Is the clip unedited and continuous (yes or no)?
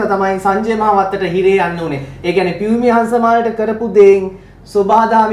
yes